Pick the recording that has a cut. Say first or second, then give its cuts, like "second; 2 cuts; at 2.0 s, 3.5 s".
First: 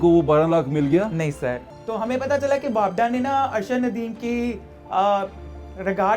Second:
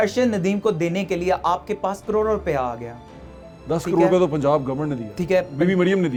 first; 1 cut; at 1.7 s